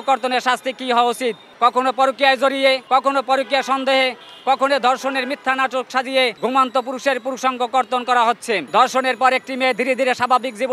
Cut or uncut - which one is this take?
cut